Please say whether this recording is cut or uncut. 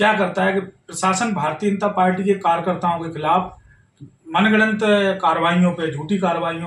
uncut